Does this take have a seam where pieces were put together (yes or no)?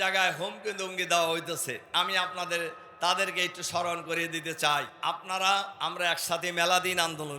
yes